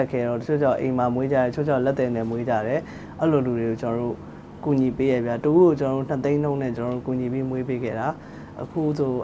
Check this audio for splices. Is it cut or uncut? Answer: uncut